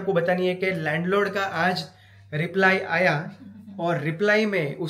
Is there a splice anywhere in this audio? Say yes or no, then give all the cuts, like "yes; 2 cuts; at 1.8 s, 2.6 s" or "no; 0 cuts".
no; 0 cuts